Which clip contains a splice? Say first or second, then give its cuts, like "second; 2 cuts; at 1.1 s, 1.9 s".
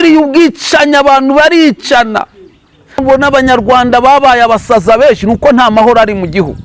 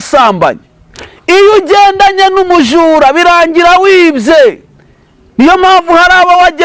first; 1 cut; at 3.0 s